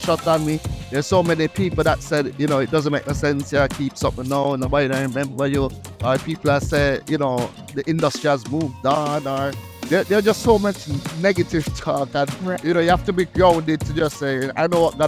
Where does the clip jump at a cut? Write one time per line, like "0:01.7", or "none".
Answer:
none